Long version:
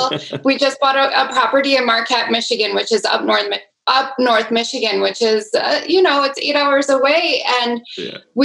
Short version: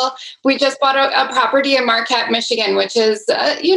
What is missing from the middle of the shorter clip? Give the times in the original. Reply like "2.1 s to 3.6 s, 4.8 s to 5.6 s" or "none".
2.6 s to 4.9 s